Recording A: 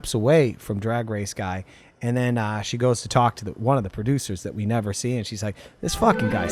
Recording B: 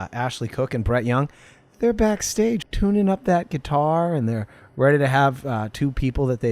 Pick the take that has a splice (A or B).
B